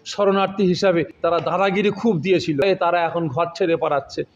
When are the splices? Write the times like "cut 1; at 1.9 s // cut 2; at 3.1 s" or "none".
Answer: cut 1; at 1.1 s // cut 2; at 2.6 s